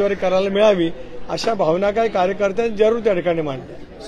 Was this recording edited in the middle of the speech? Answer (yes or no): no